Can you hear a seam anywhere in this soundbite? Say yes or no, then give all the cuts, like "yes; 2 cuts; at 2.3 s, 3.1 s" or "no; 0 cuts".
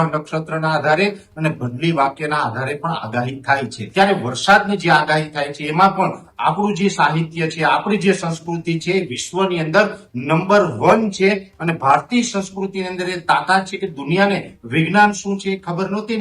yes; 1 cut; at 3.8 s